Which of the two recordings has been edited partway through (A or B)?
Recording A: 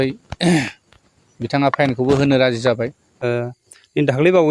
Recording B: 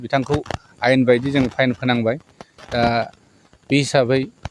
A